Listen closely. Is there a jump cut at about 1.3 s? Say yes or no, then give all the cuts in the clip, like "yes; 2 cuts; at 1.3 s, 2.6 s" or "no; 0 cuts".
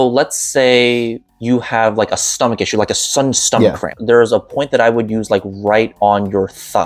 yes; 3 cuts; at 1.3 s, 3.9 s, 5.9 s